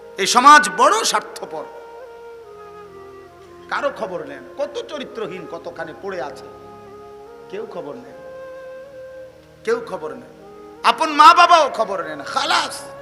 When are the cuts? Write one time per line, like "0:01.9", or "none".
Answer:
0:02.2
0:03.7